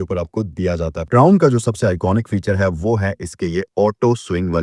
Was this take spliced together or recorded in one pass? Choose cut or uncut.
cut